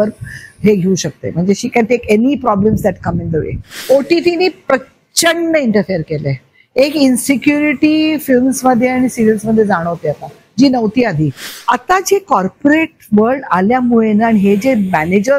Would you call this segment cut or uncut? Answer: cut